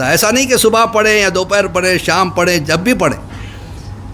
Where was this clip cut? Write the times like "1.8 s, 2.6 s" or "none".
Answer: none